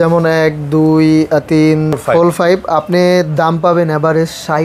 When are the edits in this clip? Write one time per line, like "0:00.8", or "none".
0:02.0